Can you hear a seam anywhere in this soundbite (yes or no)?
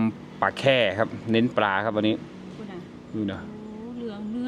no